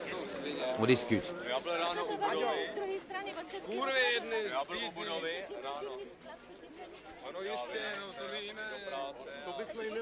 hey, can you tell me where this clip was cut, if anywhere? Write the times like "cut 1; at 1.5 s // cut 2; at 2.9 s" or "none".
none